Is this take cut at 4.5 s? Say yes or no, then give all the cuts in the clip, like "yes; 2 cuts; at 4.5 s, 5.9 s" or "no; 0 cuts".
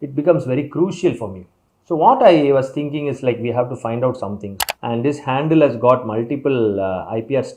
yes; 1 cut; at 4.5 s